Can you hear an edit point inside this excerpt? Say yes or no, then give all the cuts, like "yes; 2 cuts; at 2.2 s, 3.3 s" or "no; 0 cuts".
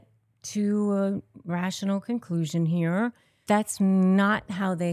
yes; 1 cut; at 3.4 s